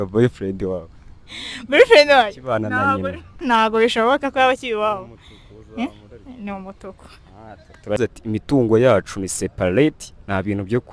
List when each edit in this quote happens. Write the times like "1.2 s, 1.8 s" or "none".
8.0 s